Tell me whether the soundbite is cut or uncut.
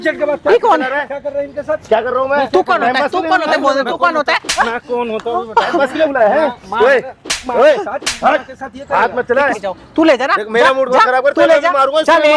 cut